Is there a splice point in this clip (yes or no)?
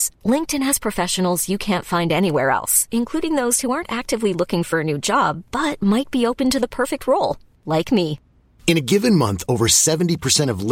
no